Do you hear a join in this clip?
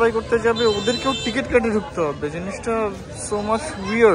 no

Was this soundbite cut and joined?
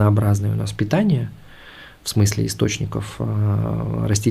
no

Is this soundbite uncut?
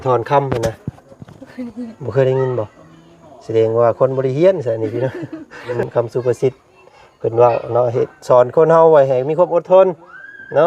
no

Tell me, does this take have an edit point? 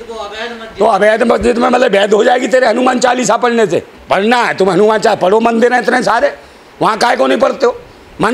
no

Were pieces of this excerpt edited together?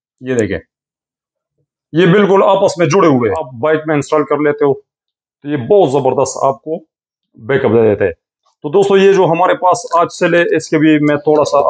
yes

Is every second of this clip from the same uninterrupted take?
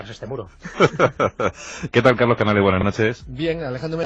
no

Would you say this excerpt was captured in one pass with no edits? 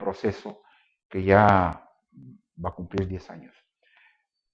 no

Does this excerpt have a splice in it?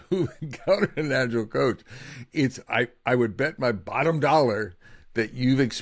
no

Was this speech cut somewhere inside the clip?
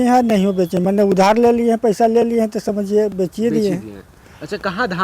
no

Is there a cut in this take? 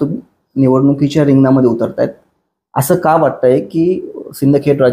no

